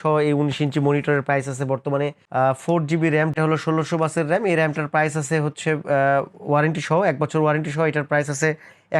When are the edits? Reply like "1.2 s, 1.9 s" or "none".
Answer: 2.2 s, 3.3 s